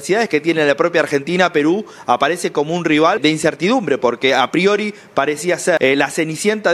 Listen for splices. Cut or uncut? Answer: cut